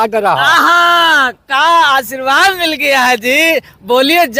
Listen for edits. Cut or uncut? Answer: uncut